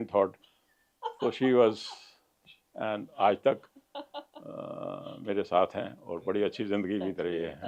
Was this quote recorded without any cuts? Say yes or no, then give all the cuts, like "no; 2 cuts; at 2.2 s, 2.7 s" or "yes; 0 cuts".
yes; 0 cuts